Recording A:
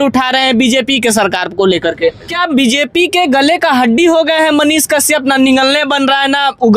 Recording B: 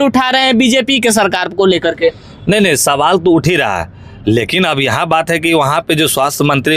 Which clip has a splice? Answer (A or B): A